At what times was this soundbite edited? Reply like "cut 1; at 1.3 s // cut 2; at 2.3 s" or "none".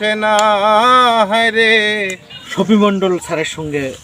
cut 1; at 2.2 s